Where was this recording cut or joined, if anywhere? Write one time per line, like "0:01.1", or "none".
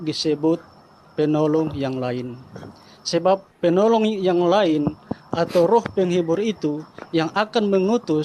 none